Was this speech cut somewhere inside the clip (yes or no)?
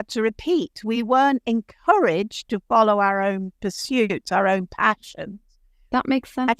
no